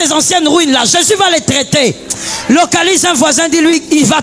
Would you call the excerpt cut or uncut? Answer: uncut